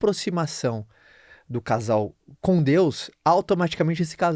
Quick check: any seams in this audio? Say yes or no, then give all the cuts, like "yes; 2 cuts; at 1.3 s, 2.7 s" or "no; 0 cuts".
yes; 1 cut; at 2.3 s